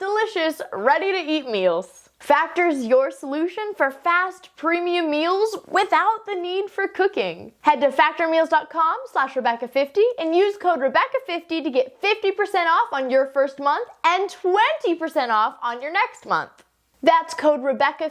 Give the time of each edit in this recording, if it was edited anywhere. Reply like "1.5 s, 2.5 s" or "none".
2.0 s, 7.5 s